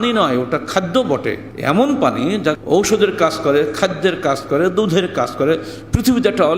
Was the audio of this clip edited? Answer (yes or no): yes